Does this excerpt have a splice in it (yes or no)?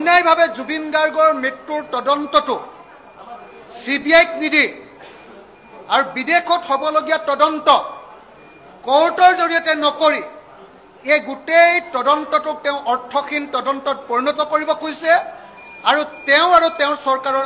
no